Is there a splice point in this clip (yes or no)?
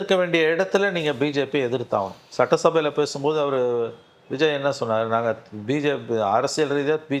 no